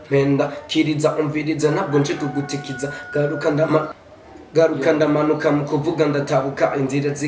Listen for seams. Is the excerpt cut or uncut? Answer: cut